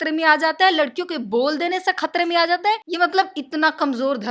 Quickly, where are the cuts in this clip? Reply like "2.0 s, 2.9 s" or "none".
2.9 s